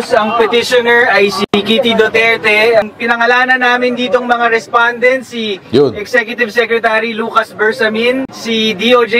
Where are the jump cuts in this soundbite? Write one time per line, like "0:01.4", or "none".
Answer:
0:02.8